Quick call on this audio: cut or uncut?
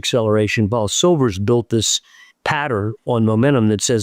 uncut